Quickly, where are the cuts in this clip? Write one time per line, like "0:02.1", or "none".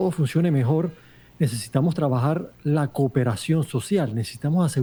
none